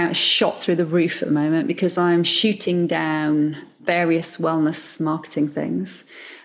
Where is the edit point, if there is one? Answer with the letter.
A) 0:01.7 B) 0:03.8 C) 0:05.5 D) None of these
B